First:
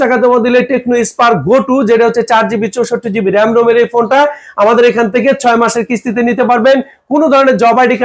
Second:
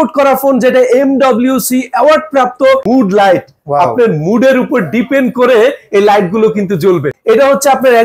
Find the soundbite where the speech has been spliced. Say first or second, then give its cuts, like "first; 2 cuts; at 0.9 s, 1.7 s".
second; 2 cuts; at 2.8 s, 7.1 s